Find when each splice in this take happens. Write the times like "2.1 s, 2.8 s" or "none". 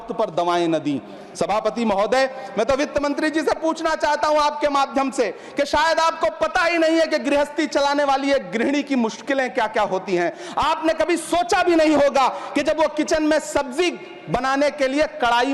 none